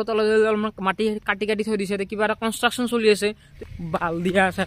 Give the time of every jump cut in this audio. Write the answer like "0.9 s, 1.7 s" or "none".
3.5 s